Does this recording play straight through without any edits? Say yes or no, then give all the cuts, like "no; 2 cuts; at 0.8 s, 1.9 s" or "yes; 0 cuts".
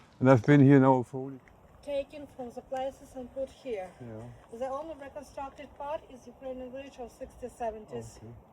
no; 1 cut; at 1.1 s